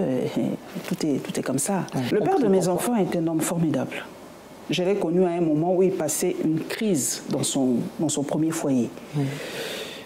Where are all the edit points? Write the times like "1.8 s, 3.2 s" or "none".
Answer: 2.1 s